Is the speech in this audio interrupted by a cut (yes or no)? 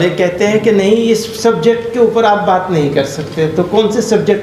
no